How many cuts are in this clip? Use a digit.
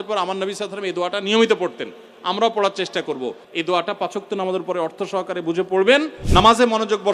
2